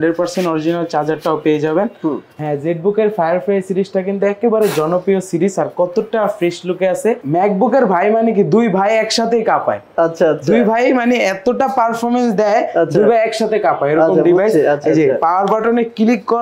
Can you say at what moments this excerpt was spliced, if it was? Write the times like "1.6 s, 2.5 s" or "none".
2.3 s, 7.2 s